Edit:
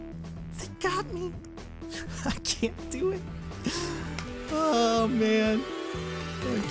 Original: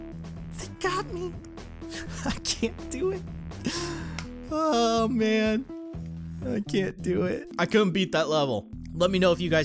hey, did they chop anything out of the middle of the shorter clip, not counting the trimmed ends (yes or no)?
no